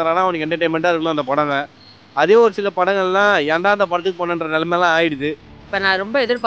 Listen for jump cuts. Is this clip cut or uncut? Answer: cut